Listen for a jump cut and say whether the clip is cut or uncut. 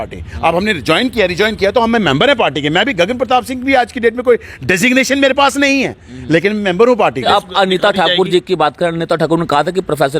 cut